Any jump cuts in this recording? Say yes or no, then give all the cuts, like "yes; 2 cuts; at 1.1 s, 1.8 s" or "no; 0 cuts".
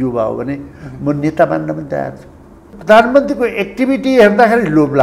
yes; 1 cut; at 2.7 s